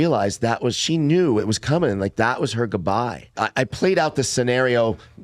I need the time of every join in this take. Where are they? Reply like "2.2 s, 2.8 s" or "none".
3.4 s